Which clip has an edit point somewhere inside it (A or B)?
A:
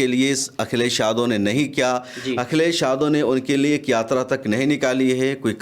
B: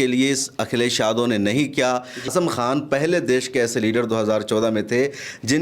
B